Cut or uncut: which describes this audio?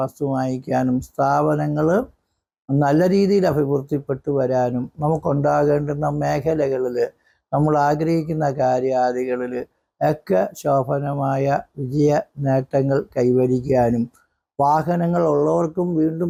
uncut